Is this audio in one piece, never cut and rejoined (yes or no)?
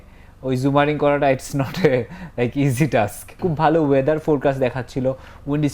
no